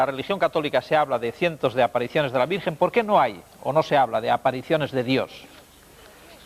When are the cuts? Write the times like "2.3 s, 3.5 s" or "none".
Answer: none